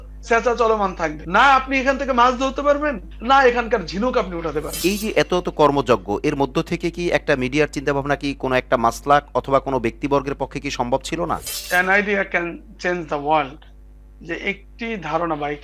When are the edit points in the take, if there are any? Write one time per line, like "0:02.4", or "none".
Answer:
0:04.8
0:11.5